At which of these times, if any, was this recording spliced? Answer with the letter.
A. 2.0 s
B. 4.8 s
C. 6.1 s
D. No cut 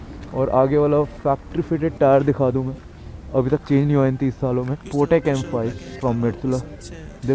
B